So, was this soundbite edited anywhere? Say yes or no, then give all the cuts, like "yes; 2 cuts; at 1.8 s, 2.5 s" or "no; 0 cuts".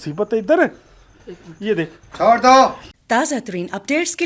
yes; 1 cut; at 2.8 s